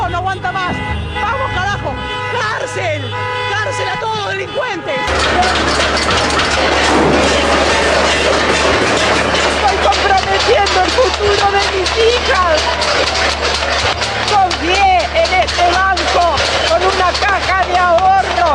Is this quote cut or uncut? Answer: uncut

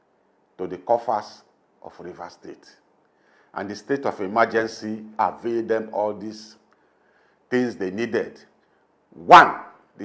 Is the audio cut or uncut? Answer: uncut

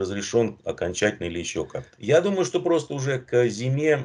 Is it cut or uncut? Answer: cut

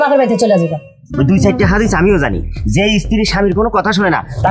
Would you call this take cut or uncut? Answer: cut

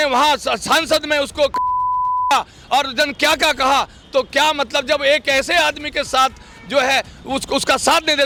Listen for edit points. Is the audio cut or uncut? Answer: uncut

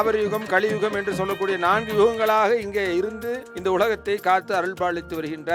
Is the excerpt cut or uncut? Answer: uncut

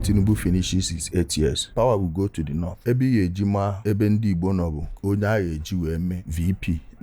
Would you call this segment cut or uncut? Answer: uncut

